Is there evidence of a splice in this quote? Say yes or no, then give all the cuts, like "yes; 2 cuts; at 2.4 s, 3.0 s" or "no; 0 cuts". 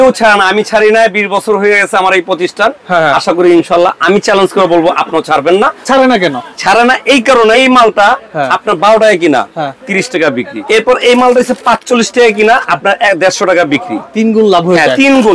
yes; 3 cuts; at 5.8 s, 7.5 s, 10.6 s